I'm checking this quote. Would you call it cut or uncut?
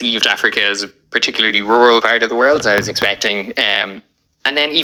uncut